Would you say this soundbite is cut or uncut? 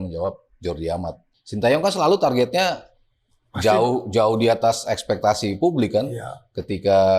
cut